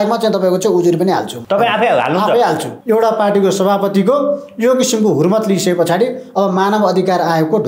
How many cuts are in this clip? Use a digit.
2